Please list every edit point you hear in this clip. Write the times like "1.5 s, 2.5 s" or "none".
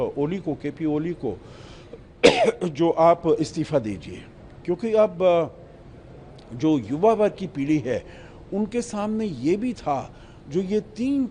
none